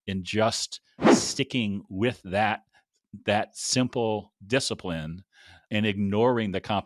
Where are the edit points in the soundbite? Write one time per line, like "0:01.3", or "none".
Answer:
none

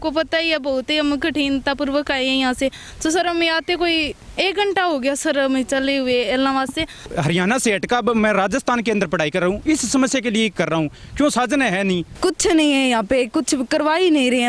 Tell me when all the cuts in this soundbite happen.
0:07.1
0:12.1

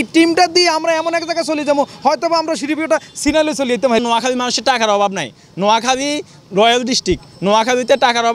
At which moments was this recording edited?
0:04.0

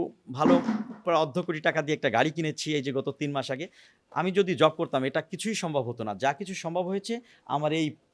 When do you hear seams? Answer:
none

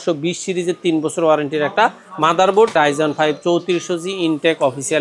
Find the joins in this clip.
0:02.8

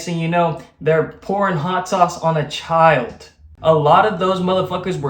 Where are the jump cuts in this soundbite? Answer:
0:03.5

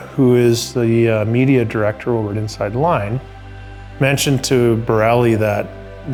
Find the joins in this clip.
none

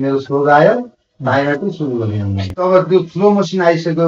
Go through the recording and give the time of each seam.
0:02.6

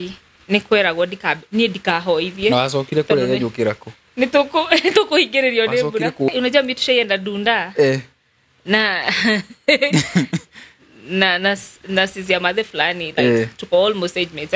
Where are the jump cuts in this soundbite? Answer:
0:06.3

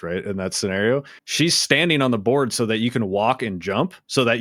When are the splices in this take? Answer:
0:01.1

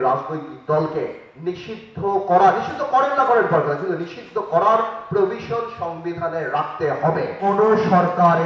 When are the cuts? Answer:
0:07.4

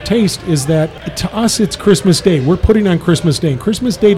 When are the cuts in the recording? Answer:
0:01.0

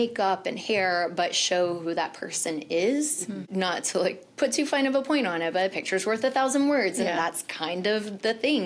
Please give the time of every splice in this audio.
0:03.5

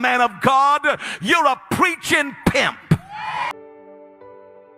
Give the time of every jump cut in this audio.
0:03.5

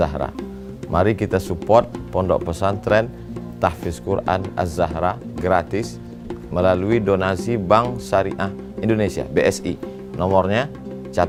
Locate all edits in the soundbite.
none

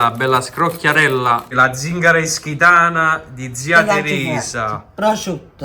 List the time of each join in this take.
0:01.5

